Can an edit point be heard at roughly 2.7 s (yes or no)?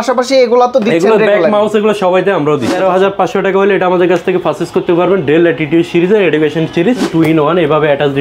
yes